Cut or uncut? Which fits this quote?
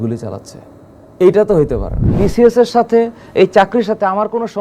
cut